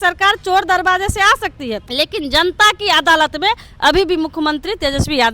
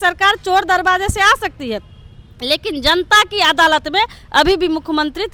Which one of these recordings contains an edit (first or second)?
first